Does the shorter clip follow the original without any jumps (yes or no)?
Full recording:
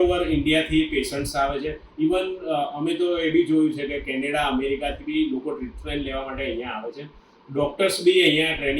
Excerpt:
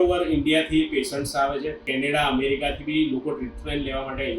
no